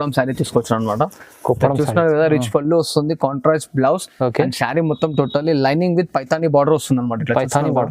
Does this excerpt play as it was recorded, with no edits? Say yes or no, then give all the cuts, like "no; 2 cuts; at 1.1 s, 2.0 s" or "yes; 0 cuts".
yes; 0 cuts